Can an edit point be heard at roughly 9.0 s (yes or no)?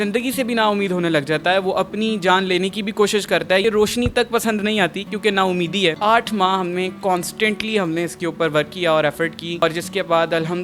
no